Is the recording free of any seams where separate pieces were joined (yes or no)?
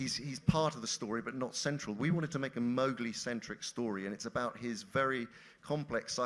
yes